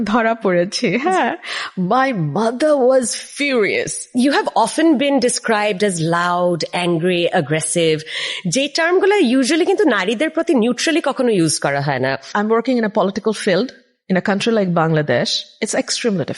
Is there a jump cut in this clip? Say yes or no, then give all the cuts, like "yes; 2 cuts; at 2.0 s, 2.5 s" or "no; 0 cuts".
yes; 3 cuts; at 4.0 s, 12.3 s, 15.4 s